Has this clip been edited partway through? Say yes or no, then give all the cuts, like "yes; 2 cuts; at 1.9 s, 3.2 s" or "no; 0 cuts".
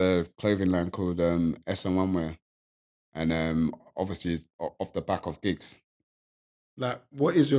yes; 1 cut; at 6.3 s